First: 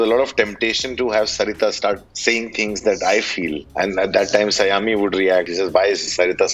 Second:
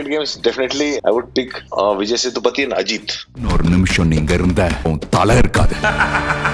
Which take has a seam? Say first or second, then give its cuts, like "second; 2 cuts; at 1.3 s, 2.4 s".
first; 3 cuts; at 2.1 s, 3.6 s, 5.5 s